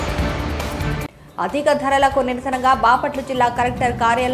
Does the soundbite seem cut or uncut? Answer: uncut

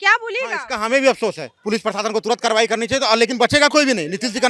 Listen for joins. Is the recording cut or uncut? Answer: cut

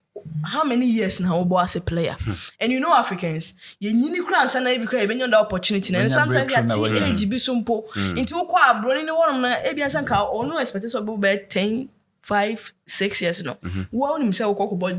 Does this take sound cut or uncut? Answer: uncut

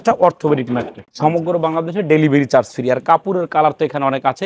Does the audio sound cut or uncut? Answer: cut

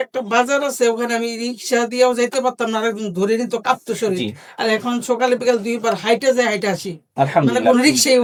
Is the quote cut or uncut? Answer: uncut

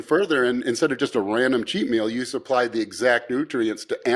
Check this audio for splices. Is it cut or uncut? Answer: uncut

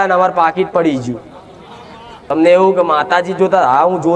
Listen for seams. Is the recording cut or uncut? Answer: cut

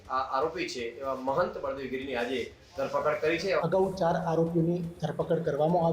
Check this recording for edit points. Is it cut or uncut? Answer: cut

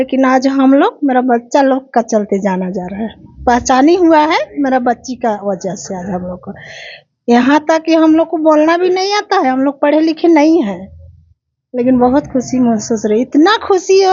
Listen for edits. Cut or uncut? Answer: uncut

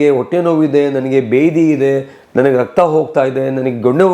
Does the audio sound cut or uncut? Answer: uncut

